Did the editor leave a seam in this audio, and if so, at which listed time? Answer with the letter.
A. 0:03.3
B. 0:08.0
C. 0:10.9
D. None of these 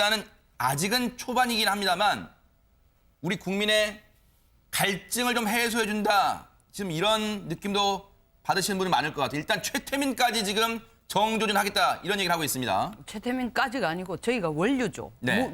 B